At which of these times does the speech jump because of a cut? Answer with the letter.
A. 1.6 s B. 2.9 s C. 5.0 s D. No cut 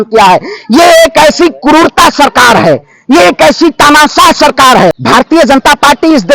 C